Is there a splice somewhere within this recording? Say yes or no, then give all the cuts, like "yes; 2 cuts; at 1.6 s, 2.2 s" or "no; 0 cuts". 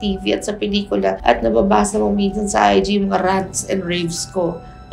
no; 0 cuts